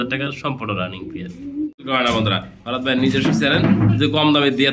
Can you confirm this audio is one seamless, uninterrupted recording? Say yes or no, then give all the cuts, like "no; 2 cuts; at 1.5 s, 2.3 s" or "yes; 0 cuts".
no; 1 cut; at 1.9 s